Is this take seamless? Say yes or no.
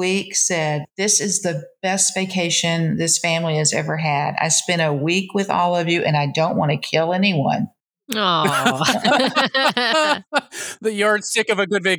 yes